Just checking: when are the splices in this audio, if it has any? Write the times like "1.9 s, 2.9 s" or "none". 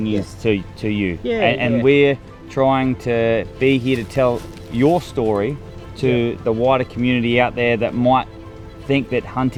none